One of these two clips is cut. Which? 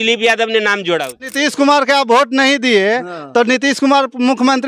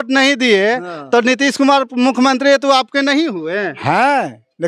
first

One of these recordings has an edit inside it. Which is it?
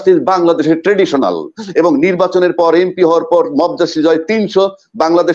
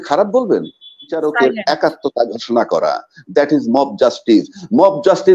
second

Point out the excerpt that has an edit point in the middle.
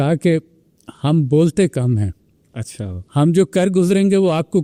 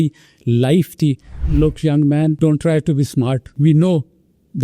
second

